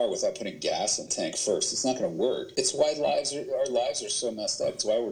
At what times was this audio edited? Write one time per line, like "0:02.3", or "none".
0:01.0
0:02.5